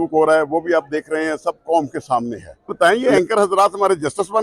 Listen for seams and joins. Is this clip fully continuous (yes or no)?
no